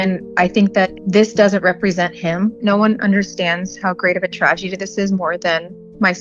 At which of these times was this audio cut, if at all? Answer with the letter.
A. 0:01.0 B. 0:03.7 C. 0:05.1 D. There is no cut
A